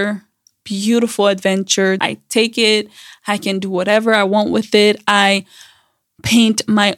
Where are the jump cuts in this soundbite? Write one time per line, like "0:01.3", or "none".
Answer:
0:02.0